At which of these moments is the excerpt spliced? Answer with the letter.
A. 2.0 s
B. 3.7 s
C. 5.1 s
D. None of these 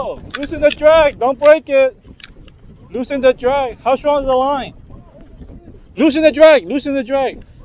D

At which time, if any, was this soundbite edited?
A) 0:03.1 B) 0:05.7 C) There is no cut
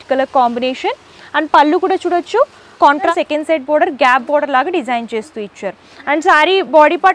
A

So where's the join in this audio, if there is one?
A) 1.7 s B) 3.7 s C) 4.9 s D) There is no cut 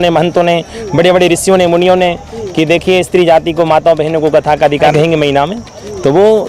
C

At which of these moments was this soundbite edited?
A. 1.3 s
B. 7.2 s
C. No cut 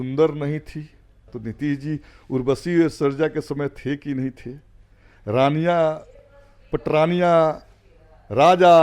A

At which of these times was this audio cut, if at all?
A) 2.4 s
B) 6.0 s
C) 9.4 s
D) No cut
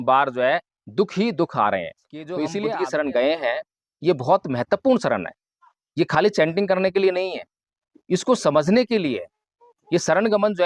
A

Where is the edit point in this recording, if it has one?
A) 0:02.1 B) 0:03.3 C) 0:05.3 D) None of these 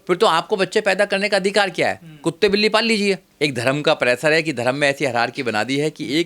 B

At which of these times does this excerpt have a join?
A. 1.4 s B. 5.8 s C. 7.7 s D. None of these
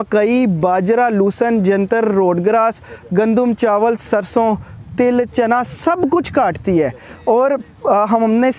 D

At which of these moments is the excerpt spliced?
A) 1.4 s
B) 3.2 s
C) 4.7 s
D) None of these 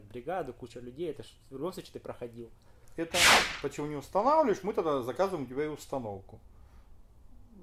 B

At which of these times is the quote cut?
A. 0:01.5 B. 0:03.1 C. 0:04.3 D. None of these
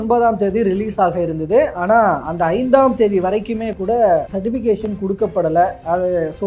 C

